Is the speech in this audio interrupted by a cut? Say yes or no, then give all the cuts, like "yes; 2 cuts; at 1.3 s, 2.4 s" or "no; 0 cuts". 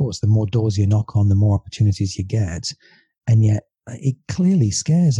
yes; 1 cut; at 3.7 s